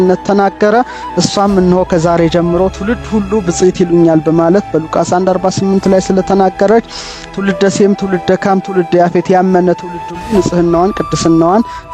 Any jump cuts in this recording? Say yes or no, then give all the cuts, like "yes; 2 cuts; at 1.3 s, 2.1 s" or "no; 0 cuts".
no; 0 cuts